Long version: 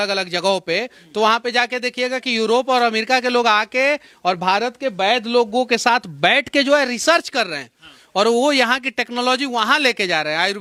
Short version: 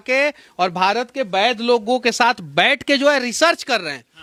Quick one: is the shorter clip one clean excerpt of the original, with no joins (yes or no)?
yes